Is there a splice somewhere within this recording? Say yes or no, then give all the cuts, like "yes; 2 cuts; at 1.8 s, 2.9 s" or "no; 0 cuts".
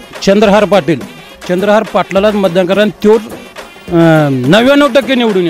no; 0 cuts